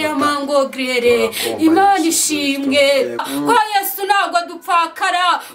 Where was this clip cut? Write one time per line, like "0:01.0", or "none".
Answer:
0:03.3